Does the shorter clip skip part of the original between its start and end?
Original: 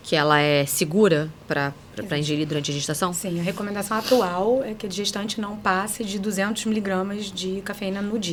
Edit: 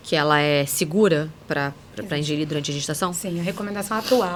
no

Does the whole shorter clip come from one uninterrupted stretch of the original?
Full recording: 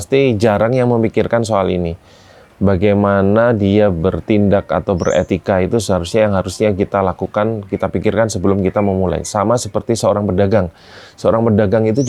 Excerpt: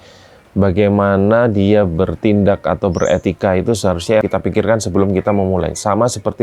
no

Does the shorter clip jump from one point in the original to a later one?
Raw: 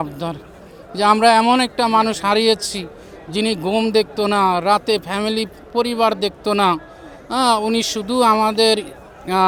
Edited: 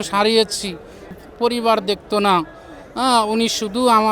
yes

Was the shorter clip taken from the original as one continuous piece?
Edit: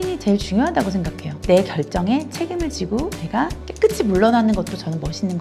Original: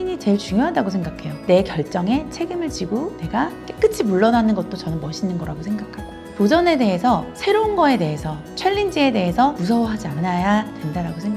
yes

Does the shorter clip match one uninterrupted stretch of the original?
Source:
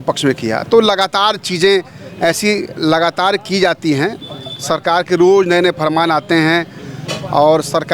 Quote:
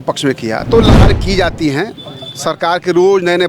no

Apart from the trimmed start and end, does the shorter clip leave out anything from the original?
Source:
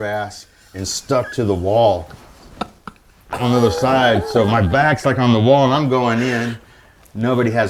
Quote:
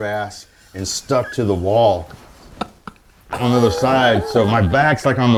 no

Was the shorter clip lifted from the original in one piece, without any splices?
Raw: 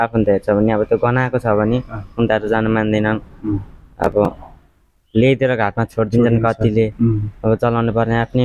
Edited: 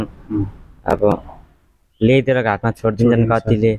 yes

